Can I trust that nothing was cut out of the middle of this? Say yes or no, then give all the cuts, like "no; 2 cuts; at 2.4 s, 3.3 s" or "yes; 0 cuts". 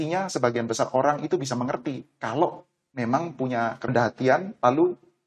no; 1 cut; at 3.9 s